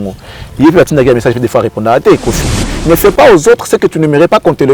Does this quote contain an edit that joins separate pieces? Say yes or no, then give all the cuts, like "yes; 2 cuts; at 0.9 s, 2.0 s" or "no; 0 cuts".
yes; 1 cut; at 2.7 s